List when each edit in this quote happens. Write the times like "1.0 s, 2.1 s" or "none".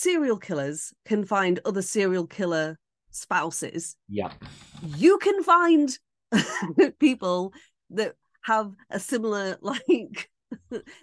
none